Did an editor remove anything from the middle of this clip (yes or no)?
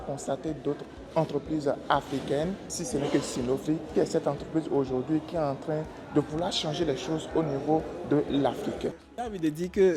yes